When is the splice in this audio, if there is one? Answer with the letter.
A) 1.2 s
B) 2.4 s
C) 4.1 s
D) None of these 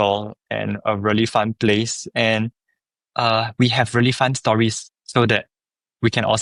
D